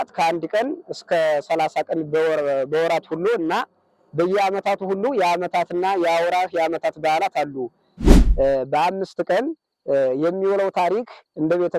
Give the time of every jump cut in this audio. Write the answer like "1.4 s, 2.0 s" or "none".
8.0 s

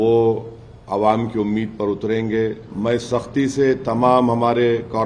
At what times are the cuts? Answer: 2.7 s

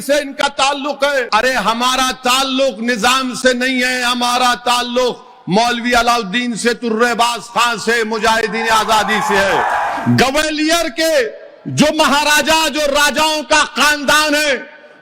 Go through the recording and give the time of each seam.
1.3 s, 9.9 s

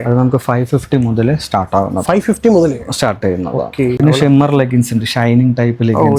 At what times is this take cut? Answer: 4.0 s

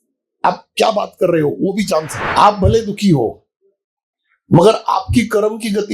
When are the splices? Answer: 2.2 s

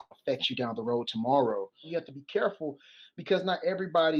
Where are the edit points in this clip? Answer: 1.9 s

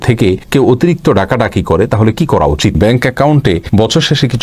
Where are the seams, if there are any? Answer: 2.8 s

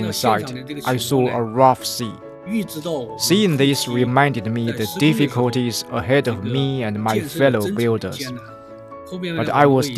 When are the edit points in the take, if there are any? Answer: 2.4 s

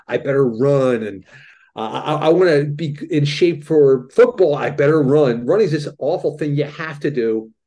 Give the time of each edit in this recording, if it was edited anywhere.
1.5 s

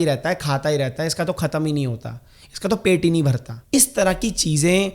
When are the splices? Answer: 3.5 s

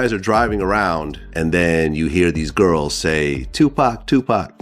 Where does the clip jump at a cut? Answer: 1.2 s

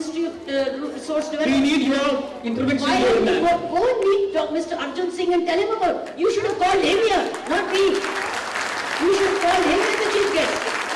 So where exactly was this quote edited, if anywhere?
none

